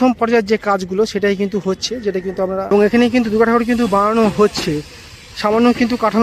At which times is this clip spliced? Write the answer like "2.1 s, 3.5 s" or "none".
2.7 s